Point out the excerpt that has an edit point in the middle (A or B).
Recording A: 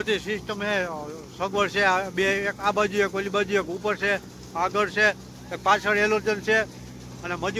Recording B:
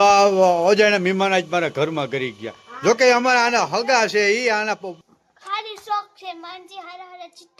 B